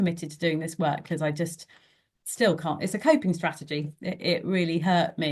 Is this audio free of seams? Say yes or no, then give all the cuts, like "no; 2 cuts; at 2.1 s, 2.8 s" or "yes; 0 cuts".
yes; 0 cuts